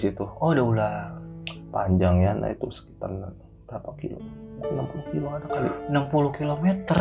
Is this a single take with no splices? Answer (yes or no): yes